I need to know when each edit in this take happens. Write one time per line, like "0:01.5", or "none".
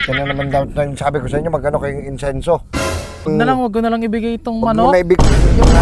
0:03.3

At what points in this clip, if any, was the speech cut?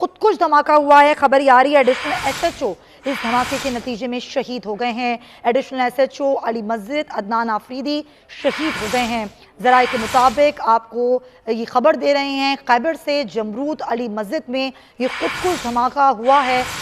none

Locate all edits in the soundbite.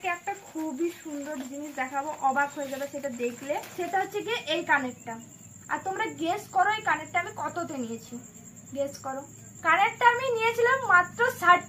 none

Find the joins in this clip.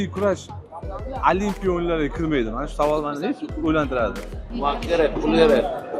0:04.5

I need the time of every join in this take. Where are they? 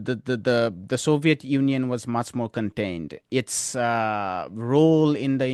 none

